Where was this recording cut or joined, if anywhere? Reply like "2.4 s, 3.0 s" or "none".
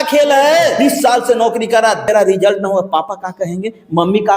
0.8 s, 2.0 s

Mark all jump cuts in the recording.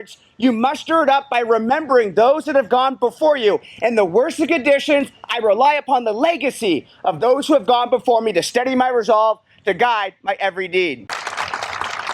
11.1 s

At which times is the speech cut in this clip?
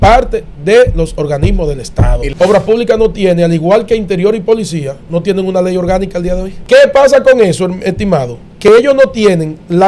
2.2 s, 6.5 s

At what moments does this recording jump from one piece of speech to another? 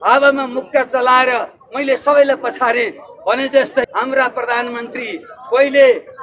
3.8 s

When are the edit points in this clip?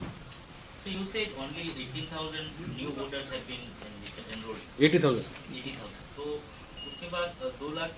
1.0 s

